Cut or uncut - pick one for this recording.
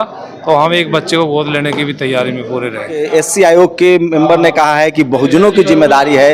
cut